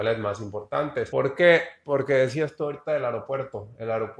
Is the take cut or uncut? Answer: cut